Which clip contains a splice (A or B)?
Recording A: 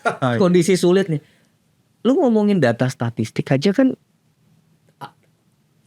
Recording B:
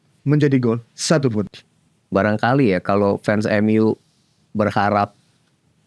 B